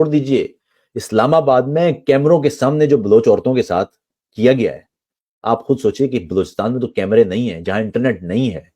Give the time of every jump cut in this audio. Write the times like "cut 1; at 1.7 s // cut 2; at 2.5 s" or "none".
none